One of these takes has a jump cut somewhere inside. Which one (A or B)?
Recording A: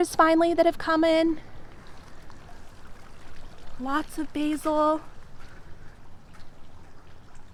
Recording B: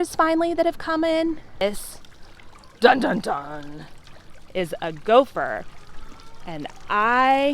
B